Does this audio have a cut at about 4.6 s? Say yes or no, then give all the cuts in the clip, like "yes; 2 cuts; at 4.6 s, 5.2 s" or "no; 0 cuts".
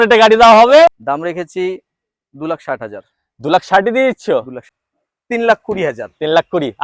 yes; 2 cuts; at 1.0 s, 4.6 s